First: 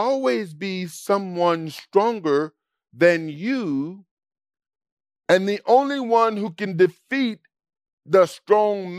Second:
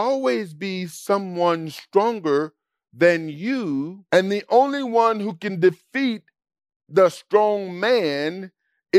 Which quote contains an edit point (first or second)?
second